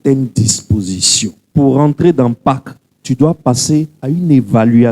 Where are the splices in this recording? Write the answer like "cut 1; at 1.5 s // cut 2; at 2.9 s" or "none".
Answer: cut 1; at 1.4 s